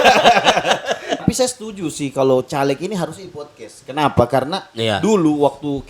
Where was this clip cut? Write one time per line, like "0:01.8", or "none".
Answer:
0:01.2